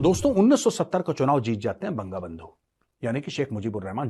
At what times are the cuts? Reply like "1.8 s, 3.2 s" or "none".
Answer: none